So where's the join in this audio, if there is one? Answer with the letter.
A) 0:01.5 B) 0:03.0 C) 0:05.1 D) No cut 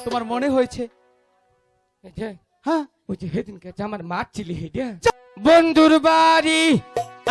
C